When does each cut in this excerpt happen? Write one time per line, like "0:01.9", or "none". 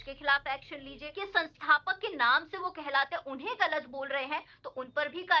0:01.1